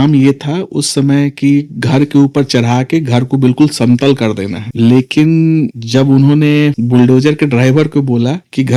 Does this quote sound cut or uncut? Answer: uncut